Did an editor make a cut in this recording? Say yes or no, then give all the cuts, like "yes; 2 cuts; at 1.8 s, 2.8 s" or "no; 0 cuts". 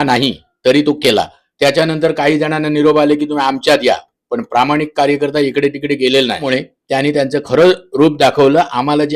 yes; 1 cut; at 6.4 s